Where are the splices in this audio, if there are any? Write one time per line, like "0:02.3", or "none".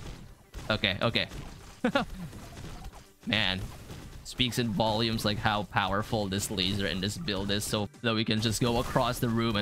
0:07.9